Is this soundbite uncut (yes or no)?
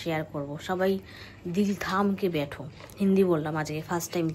yes